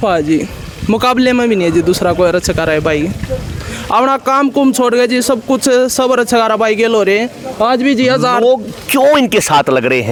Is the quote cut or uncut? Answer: uncut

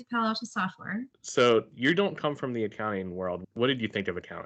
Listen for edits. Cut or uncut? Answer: cut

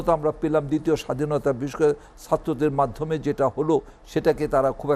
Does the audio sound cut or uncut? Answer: uncut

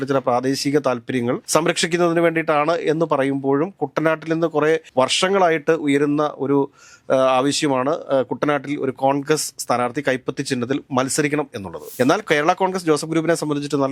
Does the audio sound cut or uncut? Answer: cut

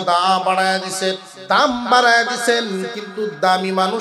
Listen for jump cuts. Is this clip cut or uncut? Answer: cut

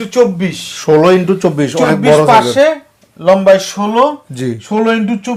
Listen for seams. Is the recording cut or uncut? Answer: uncut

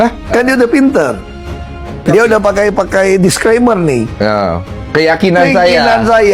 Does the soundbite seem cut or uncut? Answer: uncut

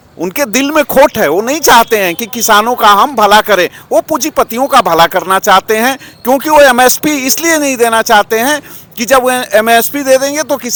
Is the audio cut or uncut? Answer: uncut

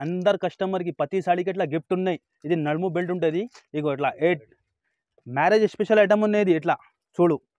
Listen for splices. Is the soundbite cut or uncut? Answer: uncut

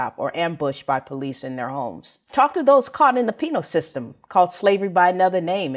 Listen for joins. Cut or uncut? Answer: uncut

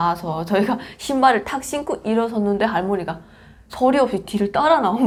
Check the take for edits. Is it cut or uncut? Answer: uncut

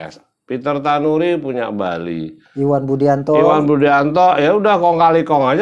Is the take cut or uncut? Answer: uncut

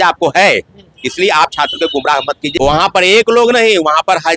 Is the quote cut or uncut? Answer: cut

